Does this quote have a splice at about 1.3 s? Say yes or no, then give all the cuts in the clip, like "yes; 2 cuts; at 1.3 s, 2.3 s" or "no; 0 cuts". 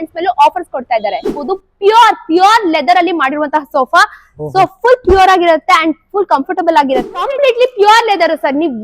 yes; 2 cuts; at 1.3 s, 7.1 s